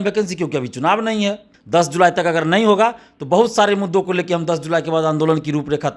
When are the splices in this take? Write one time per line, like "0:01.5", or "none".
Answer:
0:01.5

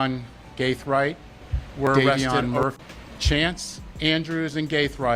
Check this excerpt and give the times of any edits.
0:02.8

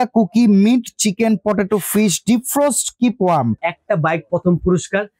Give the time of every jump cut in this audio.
0:03.7

